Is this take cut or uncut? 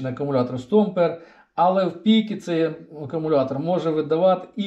uncut